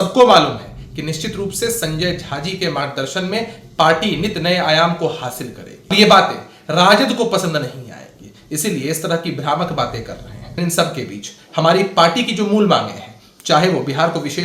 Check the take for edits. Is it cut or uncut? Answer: cut